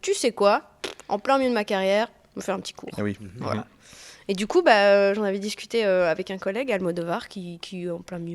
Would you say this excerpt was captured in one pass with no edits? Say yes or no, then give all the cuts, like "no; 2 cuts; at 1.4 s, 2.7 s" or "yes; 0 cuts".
yes; 0 cuts